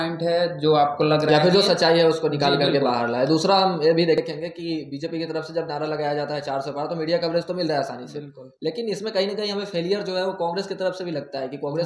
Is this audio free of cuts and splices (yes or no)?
no